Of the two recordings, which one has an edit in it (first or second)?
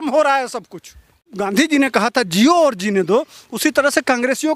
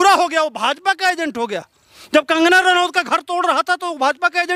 first